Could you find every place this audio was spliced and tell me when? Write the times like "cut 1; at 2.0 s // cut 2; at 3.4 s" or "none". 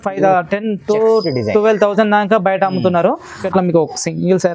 cut 1; at 3.4 s